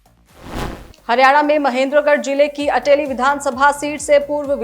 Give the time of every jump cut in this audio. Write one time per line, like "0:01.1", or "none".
0:01.0